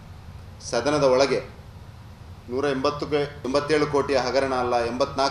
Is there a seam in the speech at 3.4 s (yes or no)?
yes